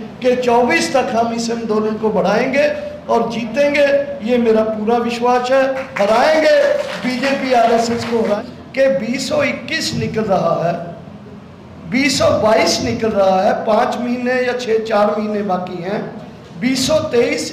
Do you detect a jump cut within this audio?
yes; 1 cut; at 8.4 s

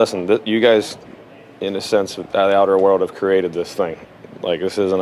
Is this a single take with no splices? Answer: yes; 0 cuts

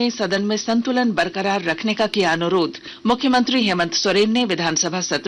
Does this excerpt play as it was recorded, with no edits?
no; 1 cut; at 2.9 s

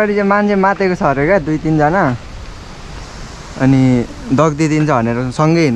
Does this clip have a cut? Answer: no; 0 cuts

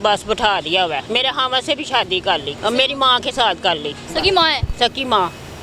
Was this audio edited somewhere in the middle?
yes; 3 cuts; at 1.0 s, 2.5 s, 4.1 s

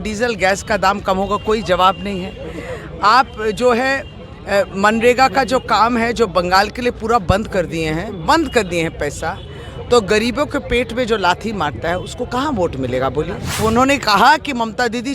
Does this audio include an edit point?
yes; 1 cut; at 13.6 s

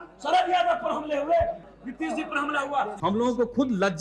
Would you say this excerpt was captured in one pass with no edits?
no; 2 cuts; at 1.6 s, 2.9 s

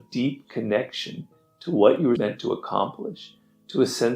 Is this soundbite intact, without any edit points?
no; 1 cut; at 2.2 s

